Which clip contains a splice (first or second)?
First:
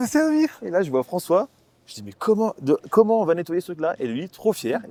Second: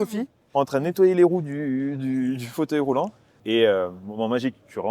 second